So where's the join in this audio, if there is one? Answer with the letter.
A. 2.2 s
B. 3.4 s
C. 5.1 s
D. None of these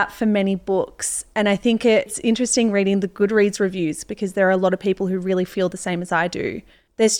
A